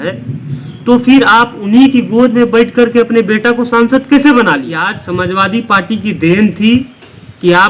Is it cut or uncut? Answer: cut